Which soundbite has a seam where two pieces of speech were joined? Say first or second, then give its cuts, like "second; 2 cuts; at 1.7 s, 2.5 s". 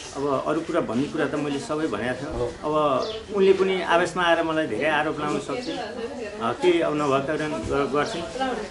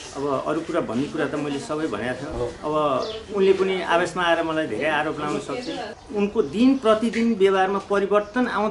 second; 1 cut; at 5.9 s